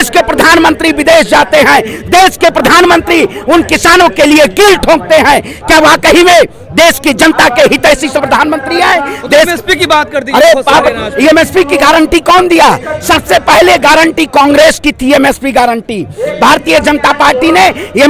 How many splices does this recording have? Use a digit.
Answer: 0